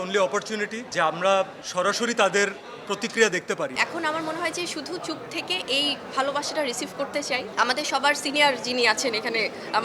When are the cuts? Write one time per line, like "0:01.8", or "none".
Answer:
0:03.7
0:07.5

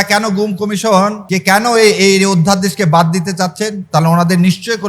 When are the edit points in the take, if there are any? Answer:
0:01.2

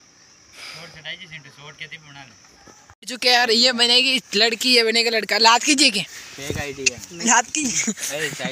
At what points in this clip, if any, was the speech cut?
0:03.0

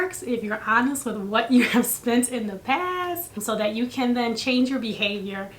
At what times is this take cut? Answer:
0:03.4

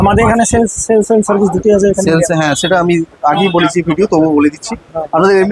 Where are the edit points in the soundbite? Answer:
none

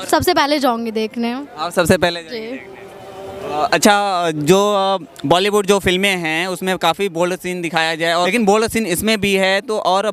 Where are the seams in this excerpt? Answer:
none

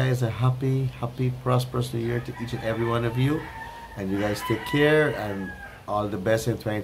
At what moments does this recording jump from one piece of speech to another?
none

